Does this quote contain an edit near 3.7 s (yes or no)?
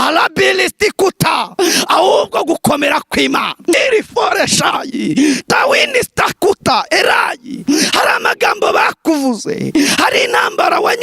yes